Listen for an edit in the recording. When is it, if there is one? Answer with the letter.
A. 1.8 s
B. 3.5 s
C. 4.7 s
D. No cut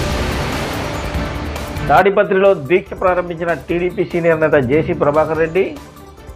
A